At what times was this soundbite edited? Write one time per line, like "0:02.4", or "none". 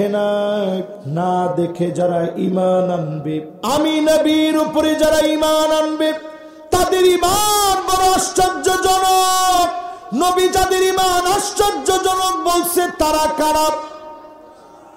0:01.0
0:03.5